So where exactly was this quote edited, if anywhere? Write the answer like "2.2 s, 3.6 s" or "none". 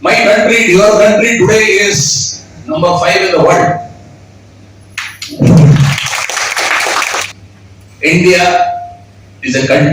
7.3 s